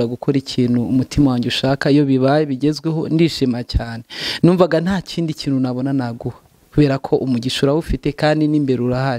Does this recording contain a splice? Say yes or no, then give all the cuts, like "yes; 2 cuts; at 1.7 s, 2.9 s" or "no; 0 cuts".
no; 0 cuts